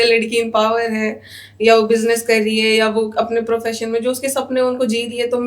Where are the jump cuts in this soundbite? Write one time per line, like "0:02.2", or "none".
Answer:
none